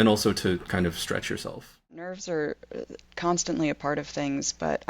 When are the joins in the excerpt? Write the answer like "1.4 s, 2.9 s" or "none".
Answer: 2.2 s